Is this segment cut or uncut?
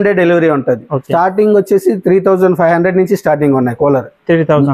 cut